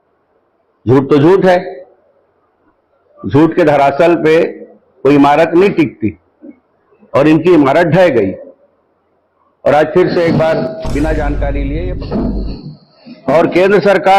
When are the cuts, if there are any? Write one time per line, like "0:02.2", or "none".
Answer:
0:11.7